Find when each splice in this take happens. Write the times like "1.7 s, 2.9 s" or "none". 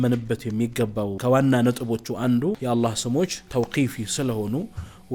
1.2 s, 2.6 s, 3.4 s

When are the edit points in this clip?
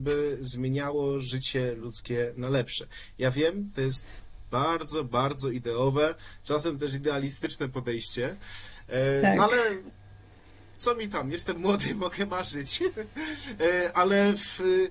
none

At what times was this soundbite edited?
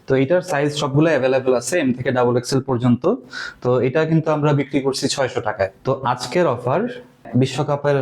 5.8 s, 7.2 s

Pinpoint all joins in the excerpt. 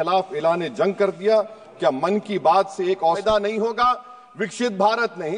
3.2 s

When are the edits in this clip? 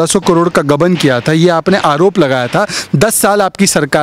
none

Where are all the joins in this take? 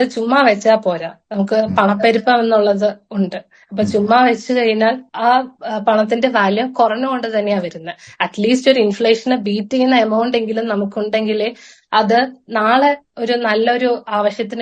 none

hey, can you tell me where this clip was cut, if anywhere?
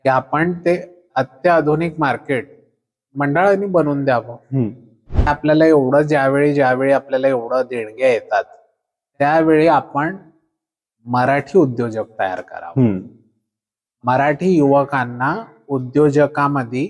5.3 s

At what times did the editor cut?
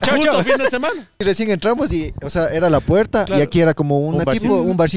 1.2 s

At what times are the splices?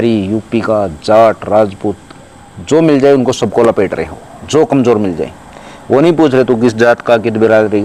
none

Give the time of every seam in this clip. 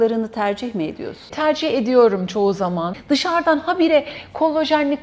1.3 s, 2.9 s

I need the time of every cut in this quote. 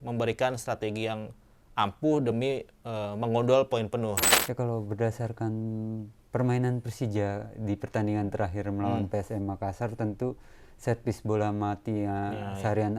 4.3 s

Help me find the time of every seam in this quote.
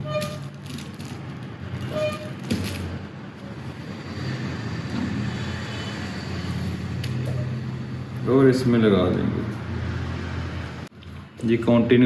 10.9 s

